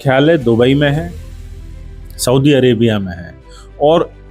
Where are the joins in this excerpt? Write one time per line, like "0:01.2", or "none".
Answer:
none